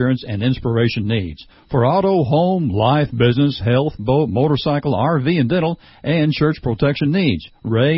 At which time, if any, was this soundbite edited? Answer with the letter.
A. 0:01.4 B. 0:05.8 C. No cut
C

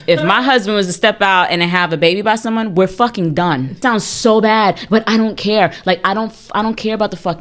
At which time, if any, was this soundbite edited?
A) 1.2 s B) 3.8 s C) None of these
B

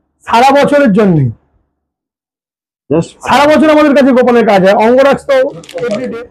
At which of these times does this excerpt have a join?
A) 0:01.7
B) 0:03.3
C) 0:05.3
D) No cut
D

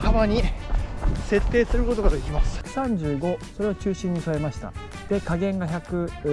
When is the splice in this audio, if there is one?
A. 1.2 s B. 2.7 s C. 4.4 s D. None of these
B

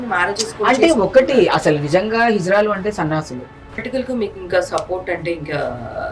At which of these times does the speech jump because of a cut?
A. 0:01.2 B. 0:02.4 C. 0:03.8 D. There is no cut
C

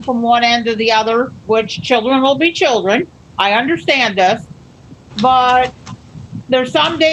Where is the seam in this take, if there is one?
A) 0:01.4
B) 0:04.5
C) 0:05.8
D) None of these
D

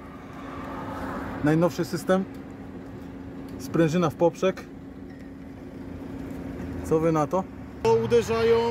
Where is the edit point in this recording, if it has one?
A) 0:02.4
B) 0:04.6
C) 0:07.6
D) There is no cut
C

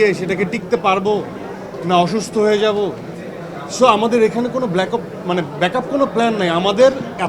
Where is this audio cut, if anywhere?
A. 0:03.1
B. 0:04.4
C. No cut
C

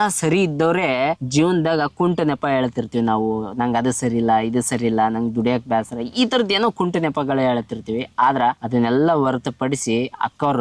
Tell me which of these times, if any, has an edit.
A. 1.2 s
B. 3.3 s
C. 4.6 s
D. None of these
A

